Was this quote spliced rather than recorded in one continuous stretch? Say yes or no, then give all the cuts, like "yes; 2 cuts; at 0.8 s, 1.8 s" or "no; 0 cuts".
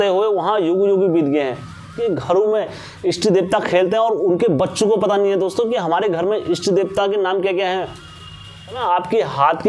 yes; 2 cuts; at 2.0 s, 8.8 s